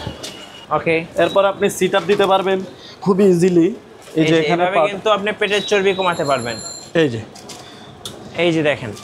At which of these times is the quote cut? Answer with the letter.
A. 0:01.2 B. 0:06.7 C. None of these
B